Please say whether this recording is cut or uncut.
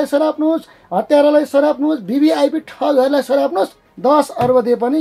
cut